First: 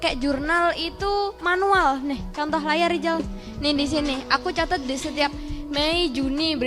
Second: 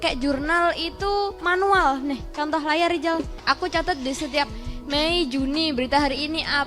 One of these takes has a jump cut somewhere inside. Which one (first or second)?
second